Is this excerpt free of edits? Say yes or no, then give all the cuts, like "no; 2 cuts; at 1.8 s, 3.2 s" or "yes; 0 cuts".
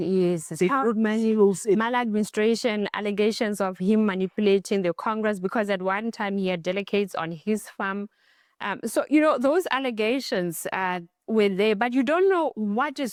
yes; 0 cuts